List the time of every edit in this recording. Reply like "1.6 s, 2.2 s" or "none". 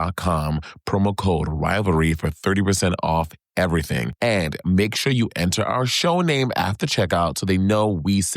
4.1 s